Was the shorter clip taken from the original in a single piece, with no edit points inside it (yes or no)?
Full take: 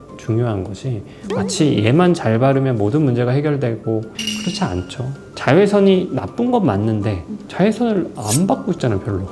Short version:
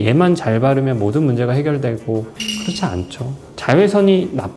yes